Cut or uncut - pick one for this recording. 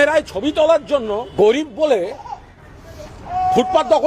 cut